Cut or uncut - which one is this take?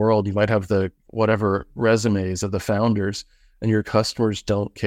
uncut